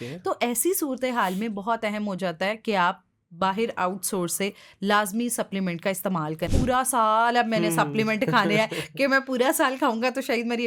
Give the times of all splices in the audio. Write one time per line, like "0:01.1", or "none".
0:06.5